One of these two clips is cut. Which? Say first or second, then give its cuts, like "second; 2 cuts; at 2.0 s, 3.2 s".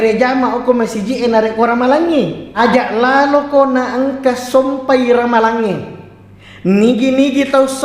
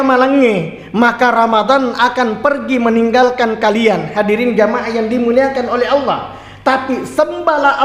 first; 1 cut; at 2.5 s